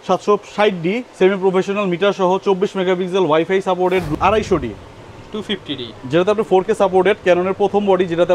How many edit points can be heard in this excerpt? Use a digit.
1